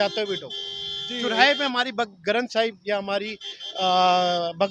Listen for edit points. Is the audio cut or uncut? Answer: uncut